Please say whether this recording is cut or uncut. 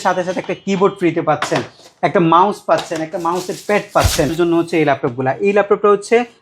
cut